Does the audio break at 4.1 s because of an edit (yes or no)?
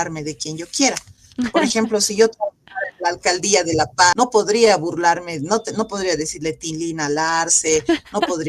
yes